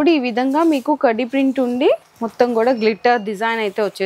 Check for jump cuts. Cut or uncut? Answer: uncut